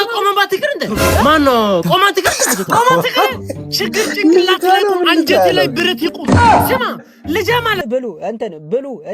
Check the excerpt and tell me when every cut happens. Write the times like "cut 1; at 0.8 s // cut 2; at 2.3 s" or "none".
cut 1; at 7.8 s